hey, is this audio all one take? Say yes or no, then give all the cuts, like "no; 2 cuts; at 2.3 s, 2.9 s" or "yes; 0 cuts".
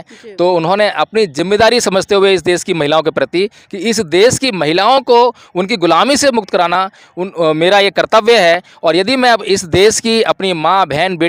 yes; 0 cuts